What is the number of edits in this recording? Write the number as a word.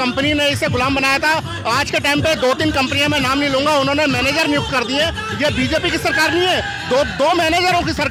zero